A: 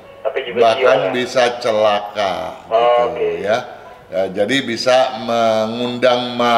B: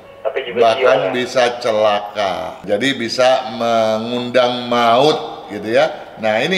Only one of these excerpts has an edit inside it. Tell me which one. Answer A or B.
B